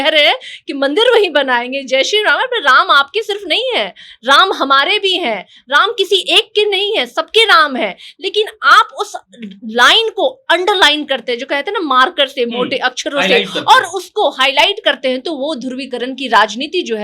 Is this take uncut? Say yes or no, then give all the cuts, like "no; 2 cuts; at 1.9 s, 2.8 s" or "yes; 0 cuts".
yes; 0 cuts